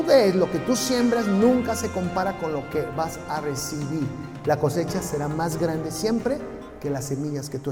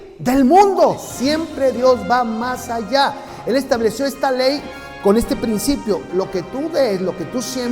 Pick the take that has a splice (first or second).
second